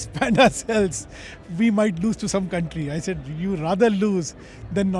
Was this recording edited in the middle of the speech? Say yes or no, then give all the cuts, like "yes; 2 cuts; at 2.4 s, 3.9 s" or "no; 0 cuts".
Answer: no; 0 cuts